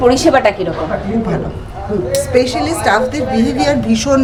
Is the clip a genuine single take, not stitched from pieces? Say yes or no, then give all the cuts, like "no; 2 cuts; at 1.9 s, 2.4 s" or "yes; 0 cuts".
yes; 0 cuts